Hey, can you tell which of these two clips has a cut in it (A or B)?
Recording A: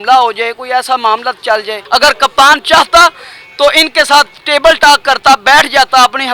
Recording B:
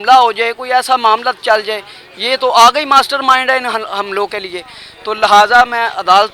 A